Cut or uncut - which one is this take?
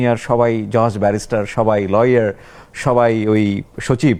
uncut